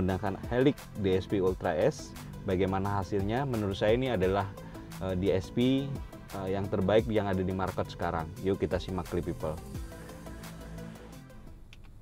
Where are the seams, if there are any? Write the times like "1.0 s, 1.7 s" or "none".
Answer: none